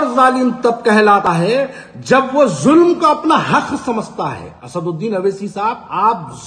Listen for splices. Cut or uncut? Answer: cut